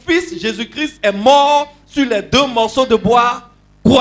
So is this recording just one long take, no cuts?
yes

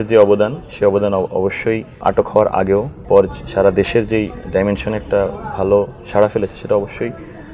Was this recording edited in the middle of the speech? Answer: yes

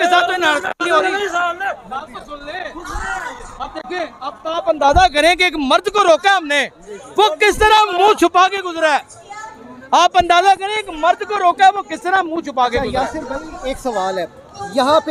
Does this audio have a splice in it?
no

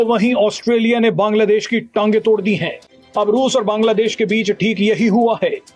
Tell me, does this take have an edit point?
yes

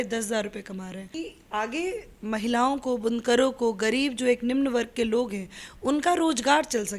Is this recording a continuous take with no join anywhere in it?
no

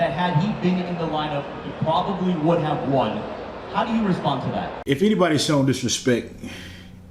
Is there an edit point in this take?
yes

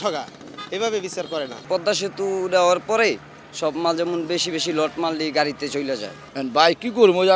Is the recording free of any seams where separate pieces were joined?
no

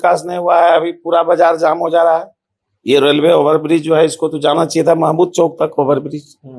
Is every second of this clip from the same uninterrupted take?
yes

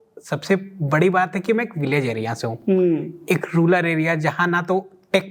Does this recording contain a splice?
no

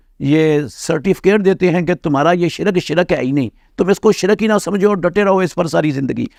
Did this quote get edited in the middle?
no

